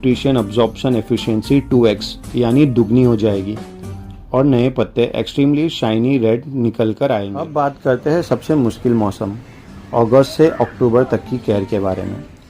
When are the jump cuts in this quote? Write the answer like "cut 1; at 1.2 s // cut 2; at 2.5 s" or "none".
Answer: cut 1; at 7.4 s